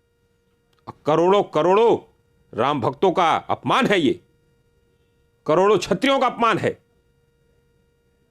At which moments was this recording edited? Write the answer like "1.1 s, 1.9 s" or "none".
none